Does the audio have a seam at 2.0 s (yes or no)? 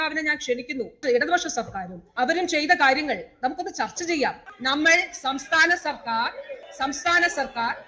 yes